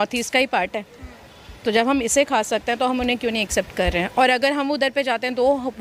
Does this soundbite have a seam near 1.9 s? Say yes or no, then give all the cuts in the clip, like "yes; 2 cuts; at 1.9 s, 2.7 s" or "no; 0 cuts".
no; 0 cuts